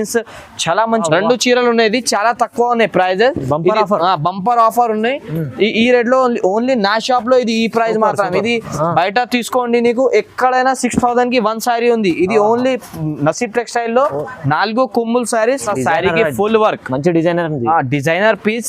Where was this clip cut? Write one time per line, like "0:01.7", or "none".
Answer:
0:01.0
0:15.6